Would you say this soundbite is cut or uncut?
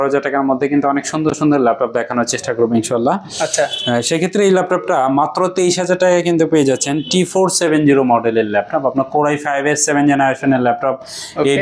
uncut